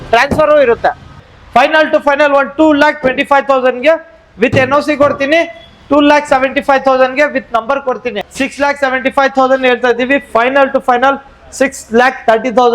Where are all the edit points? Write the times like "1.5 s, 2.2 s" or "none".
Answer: 1.2 s, 8.1 s